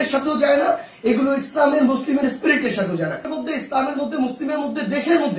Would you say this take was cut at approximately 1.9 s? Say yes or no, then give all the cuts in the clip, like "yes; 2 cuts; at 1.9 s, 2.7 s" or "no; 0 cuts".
no; 1 cut; at 3.3 s